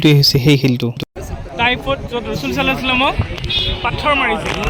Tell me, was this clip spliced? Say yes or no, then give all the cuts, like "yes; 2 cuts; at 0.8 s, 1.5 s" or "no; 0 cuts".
yes; 1 cut; at 1.2 s